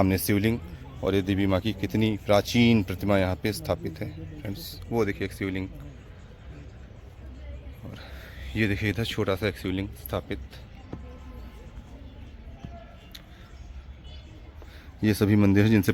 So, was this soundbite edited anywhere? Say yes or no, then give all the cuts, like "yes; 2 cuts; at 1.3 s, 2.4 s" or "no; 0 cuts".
no; 0 cuts